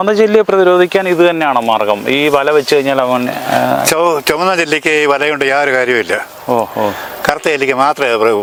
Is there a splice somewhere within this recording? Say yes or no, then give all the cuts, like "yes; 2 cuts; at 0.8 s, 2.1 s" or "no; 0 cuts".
no; 0 cuts